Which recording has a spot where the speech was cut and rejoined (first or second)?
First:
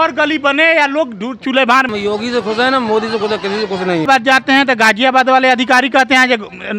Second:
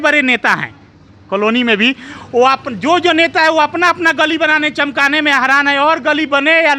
first